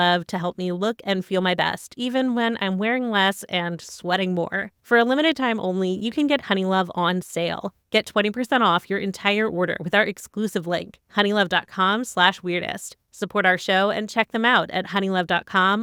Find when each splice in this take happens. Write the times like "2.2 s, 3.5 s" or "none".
none